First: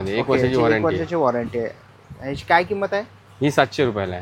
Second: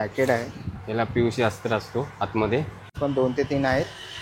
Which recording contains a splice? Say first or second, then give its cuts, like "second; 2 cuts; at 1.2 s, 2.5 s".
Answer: second; 1 cut; at 3.0 s